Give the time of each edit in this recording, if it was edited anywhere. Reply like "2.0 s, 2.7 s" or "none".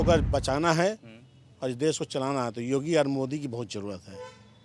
none